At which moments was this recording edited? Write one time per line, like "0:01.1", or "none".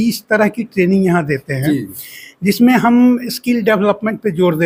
none